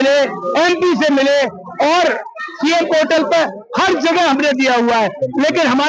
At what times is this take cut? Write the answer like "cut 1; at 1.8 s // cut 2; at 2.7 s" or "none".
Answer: none